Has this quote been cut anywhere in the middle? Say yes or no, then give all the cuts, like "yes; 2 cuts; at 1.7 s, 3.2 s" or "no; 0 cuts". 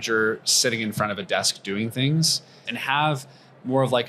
yes; 1 cut; at 2.7 s